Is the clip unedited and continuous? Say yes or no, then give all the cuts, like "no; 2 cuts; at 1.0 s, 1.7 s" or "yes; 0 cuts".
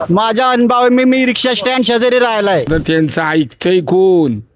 no; 1 cut; at 2.7 s